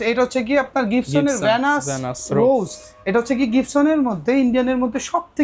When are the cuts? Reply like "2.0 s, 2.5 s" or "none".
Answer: none